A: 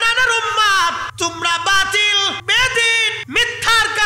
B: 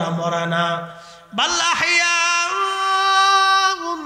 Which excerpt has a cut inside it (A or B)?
A